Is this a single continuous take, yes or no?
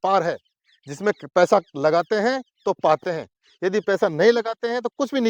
yes